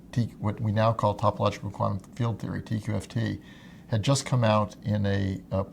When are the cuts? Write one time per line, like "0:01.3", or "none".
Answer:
none